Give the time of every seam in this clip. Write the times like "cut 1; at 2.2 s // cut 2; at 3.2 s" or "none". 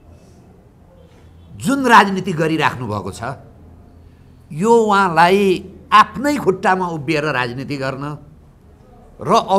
none